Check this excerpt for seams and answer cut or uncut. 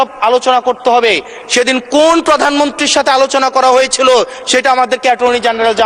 uncut